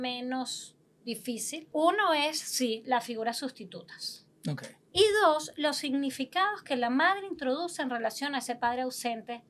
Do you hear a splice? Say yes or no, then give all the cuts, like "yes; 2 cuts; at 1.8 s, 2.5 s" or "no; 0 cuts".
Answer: yes; 2 cuts; at 1.7 s, 4.7 s